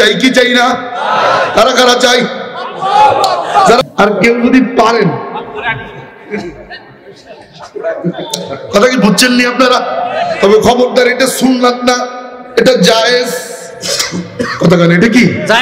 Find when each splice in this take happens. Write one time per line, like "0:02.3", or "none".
0:03.8